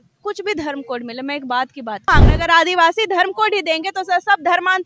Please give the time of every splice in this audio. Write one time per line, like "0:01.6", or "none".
0:02.1